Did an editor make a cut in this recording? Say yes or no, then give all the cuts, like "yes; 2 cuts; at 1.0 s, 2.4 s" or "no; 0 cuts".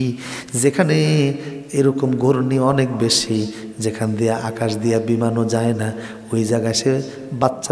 no; 0 cuts